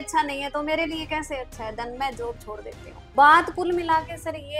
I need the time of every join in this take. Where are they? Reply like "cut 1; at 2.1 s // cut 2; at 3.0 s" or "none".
cut 1; at 2.9 s